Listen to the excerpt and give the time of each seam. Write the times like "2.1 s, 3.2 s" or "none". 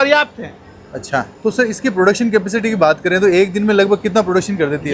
1.3 s